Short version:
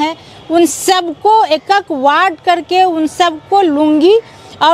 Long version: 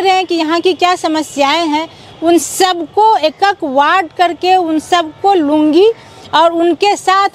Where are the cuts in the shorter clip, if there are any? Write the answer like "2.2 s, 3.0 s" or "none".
none